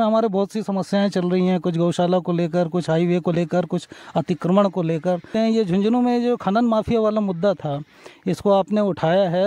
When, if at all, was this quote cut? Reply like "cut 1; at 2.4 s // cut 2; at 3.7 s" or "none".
cut 1; at 5.3 s